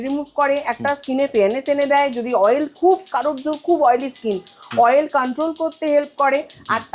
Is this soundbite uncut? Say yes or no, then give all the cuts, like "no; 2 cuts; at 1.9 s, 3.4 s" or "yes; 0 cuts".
yes; 0 cuts